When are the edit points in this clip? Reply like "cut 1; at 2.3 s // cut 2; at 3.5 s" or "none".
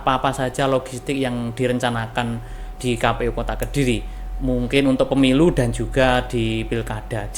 none